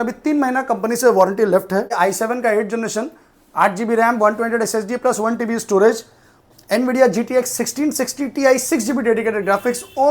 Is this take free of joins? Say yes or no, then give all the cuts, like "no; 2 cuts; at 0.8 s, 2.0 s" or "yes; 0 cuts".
no; 1 cut; at 1.9 s